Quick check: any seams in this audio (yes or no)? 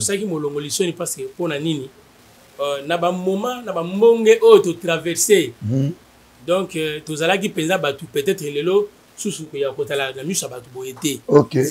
no